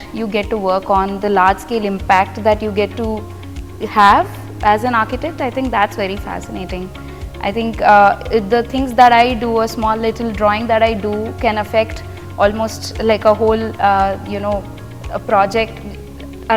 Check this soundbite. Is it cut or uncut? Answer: uncut